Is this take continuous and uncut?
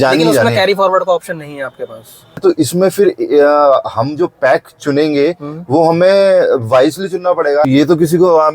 no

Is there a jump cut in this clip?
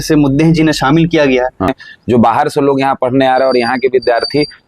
yes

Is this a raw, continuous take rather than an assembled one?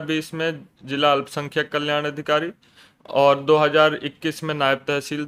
yes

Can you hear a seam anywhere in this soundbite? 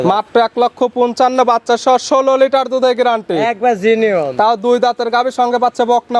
no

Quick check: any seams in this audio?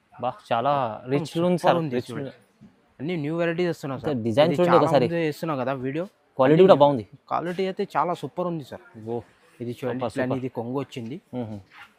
no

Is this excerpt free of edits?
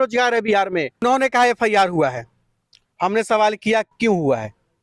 no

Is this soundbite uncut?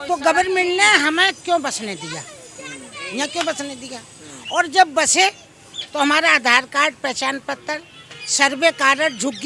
yes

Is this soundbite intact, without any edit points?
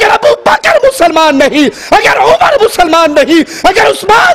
yes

